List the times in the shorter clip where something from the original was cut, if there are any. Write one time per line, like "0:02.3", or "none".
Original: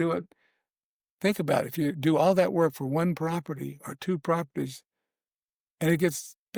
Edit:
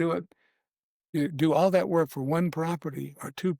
0:01.1